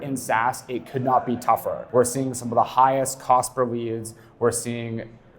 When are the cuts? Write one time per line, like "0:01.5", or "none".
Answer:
0:01.8